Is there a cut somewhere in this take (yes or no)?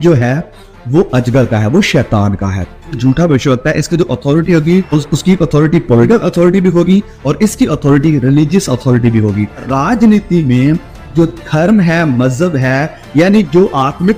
yes